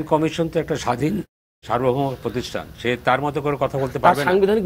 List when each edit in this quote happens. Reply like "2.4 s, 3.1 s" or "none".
none